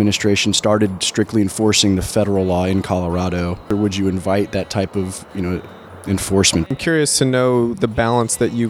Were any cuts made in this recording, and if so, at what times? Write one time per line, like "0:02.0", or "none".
0:03.7
0:06.7